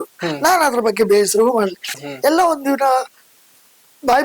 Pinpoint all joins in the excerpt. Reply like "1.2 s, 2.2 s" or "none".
1.9 s